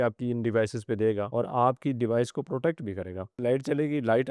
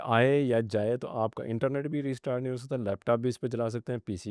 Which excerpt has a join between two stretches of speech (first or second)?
first